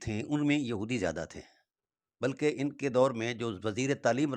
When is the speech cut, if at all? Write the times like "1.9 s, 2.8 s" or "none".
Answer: none